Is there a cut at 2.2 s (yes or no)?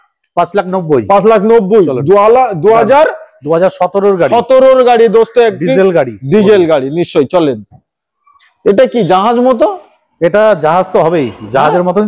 no